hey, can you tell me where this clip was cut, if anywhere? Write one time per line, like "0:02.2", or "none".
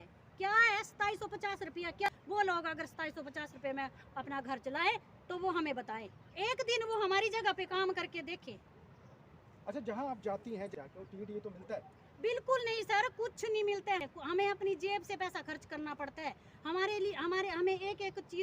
0:02.1
0:10.7
0:14.0